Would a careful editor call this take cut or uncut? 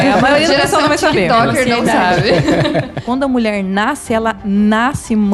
cut